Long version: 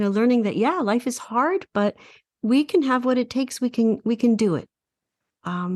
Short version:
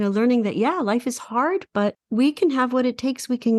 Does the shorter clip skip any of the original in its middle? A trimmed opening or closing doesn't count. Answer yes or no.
yes